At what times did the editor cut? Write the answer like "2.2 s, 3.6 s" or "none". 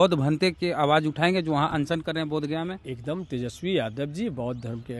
none